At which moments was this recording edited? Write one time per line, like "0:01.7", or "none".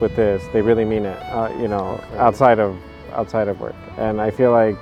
none